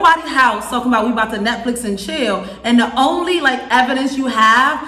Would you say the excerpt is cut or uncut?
uncut